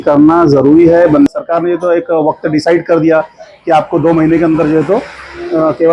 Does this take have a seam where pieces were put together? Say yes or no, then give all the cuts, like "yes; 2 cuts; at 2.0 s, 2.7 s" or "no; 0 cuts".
yes; 1 cut; at 1.3 s